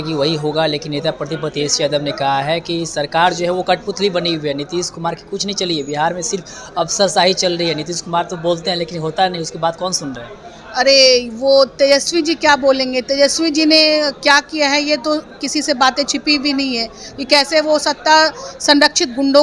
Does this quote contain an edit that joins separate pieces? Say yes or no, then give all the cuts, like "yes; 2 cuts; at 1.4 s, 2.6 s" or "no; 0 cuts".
no; 0 cuts